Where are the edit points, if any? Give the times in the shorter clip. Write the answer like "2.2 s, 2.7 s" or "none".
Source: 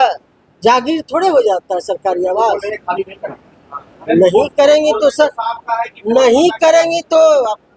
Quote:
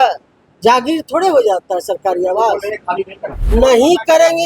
3.4 s